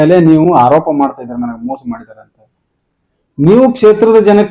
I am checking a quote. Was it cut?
no; 0 cuts

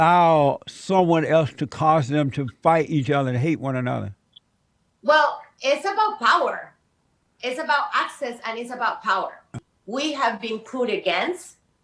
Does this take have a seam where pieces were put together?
yes; 1 cut; at 9.6 s

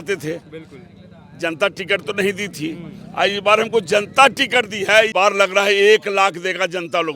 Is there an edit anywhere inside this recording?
yes; 1 cut; at 5.1 s

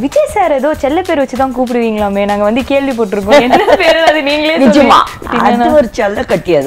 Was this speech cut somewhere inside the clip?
yes; 1 cut; at 5.2 s

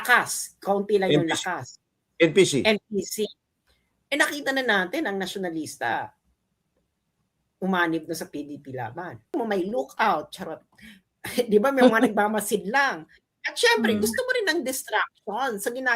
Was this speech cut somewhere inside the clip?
yes; 1 cut; at 9.3 s

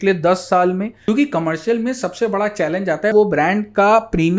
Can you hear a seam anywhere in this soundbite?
yes; 2 cuts; at 0.9 s, 3.1 s

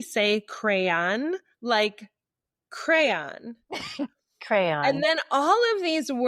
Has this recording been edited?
no; 0 cuts

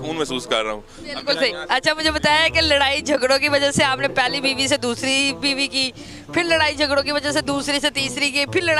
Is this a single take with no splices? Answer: yes; 0 cuts

